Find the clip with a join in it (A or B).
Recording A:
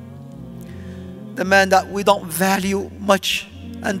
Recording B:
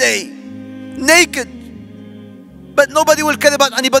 A